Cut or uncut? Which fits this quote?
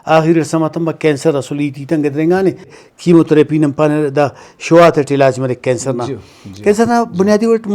cut